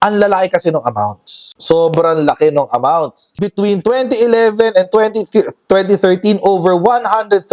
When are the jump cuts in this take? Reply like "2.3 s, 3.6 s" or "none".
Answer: 3.3 s